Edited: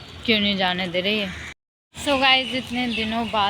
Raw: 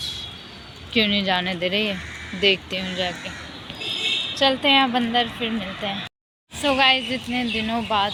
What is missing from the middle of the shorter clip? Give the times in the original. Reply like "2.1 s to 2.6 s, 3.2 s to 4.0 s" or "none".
2.2 s to 6.1 s